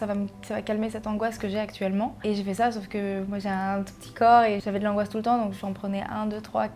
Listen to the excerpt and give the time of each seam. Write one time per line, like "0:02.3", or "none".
0:02.2
0:04.6